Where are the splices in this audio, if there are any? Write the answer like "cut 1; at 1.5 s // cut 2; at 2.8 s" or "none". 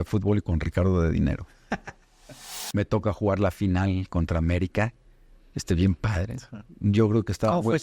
cut 1; at 2.4 s